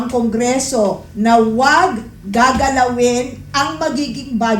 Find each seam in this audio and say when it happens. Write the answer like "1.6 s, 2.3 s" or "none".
none